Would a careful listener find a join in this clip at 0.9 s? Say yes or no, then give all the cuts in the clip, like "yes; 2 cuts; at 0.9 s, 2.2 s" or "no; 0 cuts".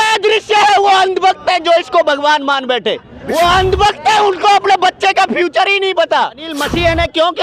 no; 2 cuts; at 3.1 s, 6.5 s